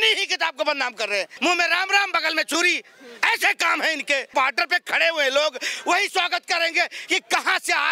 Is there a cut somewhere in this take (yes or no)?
yes